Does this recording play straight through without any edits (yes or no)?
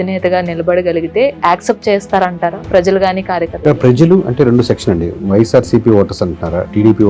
yes